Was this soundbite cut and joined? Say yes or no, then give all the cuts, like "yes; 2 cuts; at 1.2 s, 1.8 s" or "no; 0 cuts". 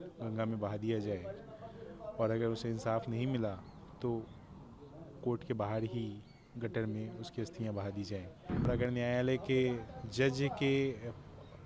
yes; 1 cut; at 8.7 s